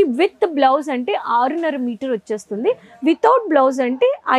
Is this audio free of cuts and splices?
yes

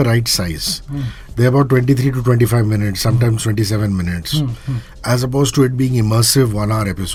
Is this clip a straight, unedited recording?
yes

